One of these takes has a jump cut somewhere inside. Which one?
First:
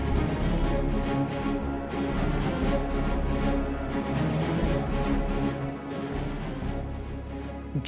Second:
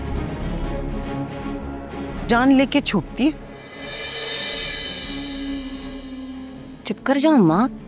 second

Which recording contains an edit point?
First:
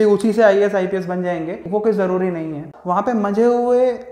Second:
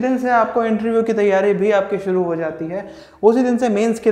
first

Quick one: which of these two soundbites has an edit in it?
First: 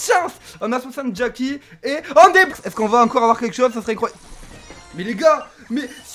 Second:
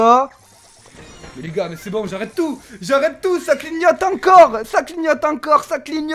first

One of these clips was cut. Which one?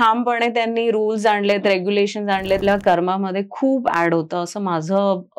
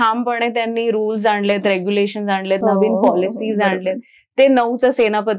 first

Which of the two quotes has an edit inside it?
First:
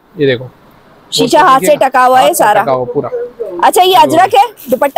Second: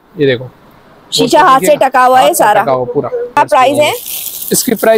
second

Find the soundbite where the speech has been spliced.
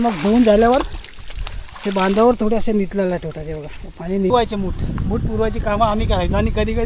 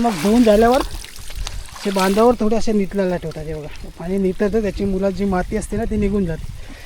first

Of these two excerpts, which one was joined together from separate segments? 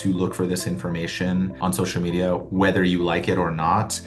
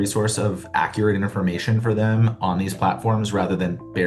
first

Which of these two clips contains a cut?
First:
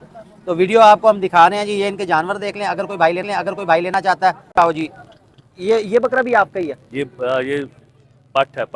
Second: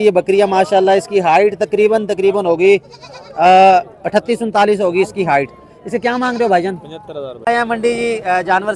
second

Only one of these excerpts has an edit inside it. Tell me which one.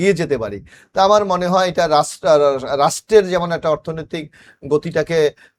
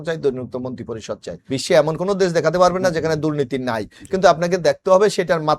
second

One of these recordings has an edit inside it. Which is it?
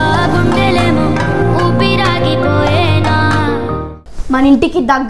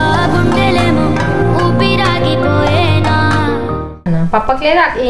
first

